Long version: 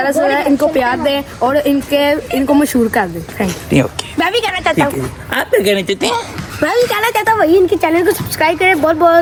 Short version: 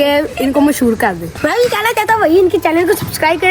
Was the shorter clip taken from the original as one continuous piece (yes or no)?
no